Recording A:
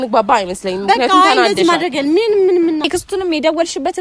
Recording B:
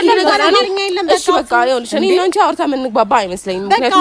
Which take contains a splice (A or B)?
A